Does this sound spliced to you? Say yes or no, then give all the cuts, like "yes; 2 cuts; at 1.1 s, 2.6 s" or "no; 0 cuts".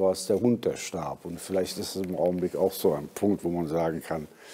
no; 0 cuts